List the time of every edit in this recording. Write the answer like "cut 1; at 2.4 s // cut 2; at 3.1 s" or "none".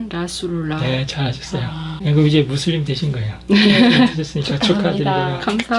cut 1; at 1.9 s